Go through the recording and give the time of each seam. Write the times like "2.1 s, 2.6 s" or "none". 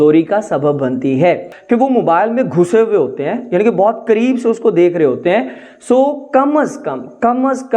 1.5 s